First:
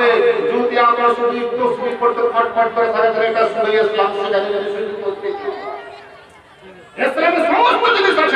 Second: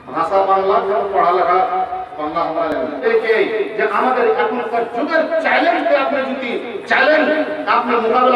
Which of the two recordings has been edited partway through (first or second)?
second